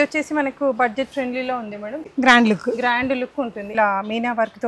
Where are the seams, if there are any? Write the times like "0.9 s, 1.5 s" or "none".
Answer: 2.0 s, 3.7 s